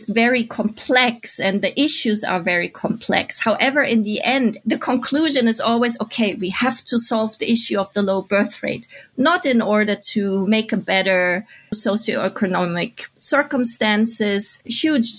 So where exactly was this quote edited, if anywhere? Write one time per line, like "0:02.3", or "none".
none